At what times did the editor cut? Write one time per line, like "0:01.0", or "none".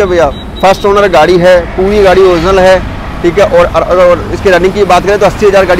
none